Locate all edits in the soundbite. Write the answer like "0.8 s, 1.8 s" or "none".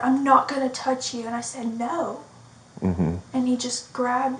none